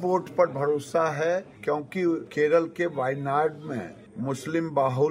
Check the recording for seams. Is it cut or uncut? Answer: cut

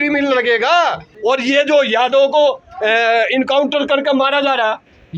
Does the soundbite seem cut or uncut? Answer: cut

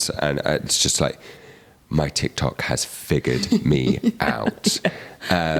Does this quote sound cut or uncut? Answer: uncut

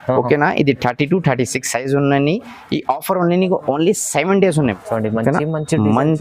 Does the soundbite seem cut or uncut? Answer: cut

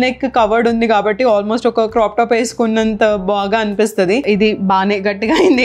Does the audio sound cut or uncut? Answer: cut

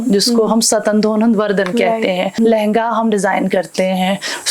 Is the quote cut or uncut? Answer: cut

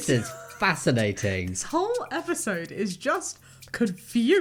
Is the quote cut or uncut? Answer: uncut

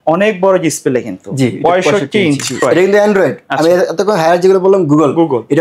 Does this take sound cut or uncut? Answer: cut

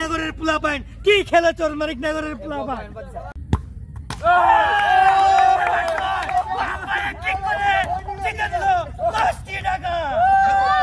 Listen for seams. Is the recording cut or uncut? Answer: uncut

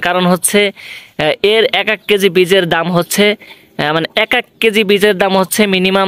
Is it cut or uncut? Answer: uncut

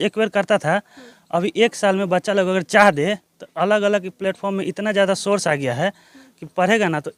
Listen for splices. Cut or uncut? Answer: uncut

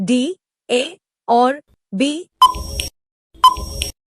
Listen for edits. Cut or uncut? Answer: cut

